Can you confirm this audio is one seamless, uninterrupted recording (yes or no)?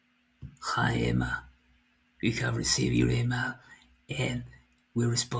yes